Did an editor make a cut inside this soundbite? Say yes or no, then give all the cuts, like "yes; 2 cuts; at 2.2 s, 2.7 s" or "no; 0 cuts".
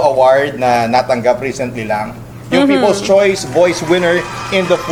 no; 0 cuts